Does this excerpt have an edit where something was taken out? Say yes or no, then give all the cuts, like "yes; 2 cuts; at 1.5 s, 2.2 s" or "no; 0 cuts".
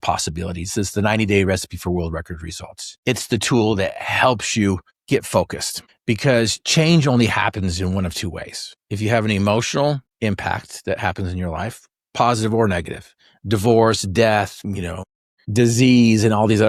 no; 0 cuts